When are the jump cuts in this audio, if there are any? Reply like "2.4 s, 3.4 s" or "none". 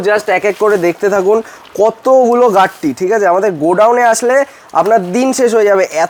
none